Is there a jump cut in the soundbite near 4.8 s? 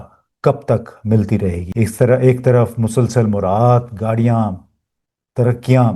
no; 1 cut; at 1.6 s

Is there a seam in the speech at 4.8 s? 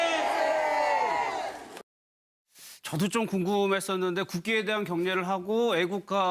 no; 1 cut; at 3.4 s

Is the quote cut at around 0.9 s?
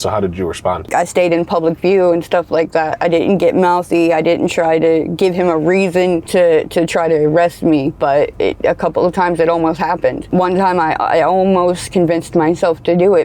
yes; 3 cuts; at 0.9 s, 6.2 s, 10.2 s

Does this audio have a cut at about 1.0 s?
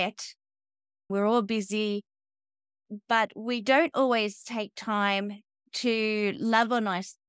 yes; 1 cut; at 1.0 s

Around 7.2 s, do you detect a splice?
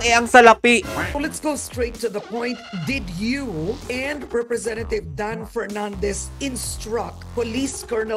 yes; 2 cuts; at 1.0 s, 7.2 s

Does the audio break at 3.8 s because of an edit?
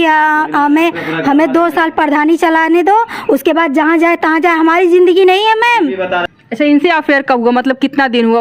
no; 1 cut; at 6.2 s

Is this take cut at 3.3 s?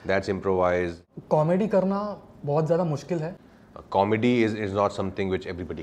yes; 2 cuts; at 1.1 s, 3.3 s

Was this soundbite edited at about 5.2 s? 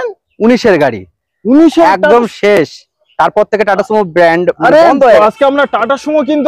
yes; 1 cut; at 5.2 s

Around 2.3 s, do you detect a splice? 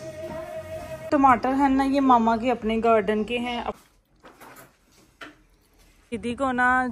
no; 3 cuts; at 1.1 s, 3.8 s, 6.2 s

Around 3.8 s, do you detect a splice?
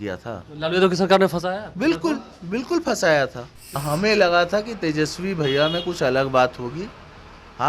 yes; 1 cut; at 3.8 s

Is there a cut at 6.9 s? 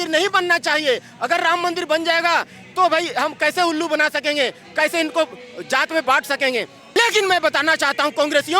yes; 1 cut; at 6.9 s

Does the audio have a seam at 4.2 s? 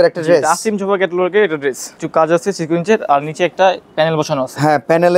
no; 1 cut; at 1.9 s

